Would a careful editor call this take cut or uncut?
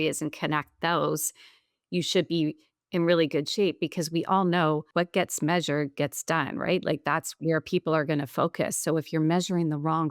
cut